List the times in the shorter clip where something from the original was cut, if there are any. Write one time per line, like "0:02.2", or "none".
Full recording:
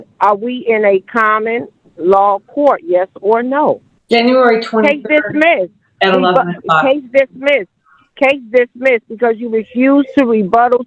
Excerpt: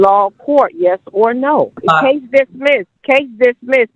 0:01.8
0:02.9